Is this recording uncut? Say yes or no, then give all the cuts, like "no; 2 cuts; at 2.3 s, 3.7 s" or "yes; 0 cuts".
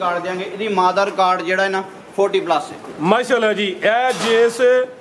yes; 0 cuts